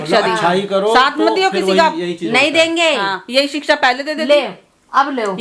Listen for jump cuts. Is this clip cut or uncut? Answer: uncut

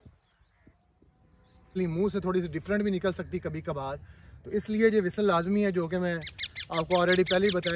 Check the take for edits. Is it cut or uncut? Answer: cut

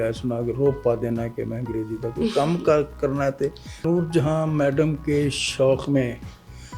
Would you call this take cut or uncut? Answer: cut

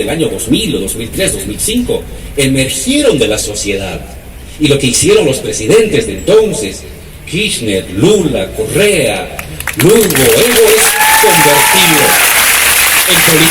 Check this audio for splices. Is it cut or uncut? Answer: uncut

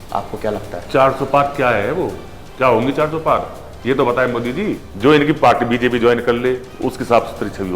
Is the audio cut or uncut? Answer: cut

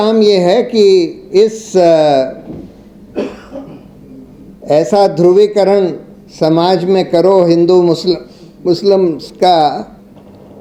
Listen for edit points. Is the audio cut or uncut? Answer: uncut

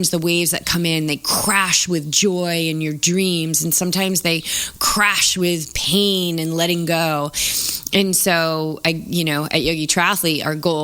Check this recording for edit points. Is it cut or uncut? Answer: uncut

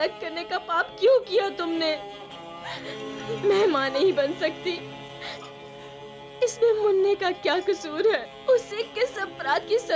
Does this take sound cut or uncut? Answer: cut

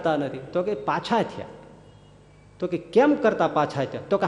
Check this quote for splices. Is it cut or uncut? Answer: uncut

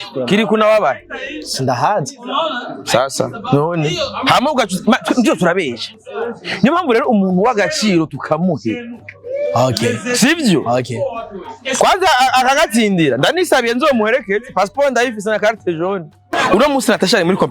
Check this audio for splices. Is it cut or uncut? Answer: cut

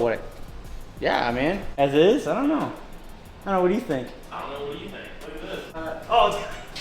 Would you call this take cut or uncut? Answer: cut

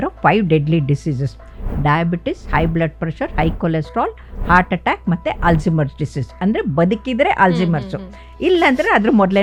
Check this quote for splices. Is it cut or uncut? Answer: uncut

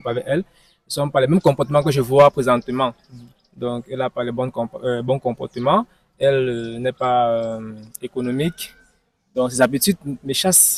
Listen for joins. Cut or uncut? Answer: uncut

